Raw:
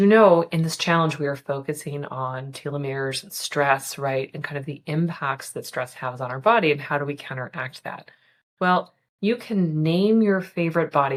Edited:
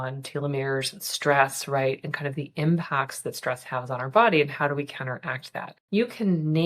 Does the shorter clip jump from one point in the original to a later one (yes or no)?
yes